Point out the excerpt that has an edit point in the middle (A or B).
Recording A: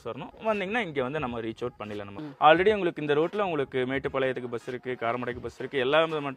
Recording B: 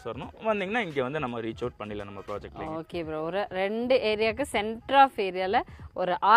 A